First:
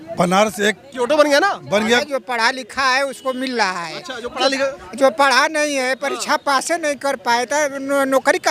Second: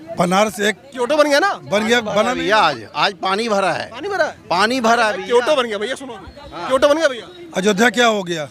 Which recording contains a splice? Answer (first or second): first